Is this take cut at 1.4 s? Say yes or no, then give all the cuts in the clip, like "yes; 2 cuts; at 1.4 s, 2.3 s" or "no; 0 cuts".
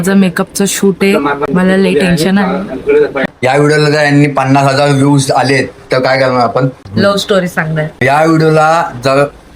yes; 4 cuts; at 1.4 s, 3.0 s, 6.8 s, 8.0 s